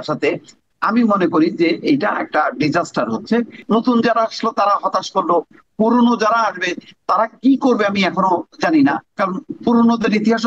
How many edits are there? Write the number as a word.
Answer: one